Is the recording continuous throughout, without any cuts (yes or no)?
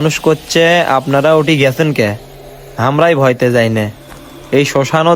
yes